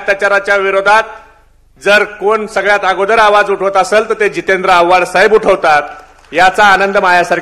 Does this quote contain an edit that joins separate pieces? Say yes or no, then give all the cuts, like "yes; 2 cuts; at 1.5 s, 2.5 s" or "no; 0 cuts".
no; 0 cuts